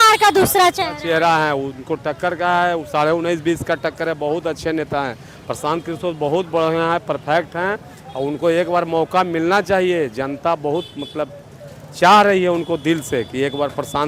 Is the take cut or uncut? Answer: uncut